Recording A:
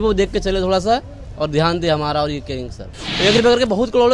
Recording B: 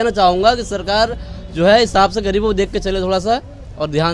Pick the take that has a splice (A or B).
A